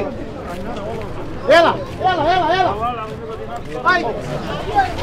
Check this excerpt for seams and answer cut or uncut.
uncut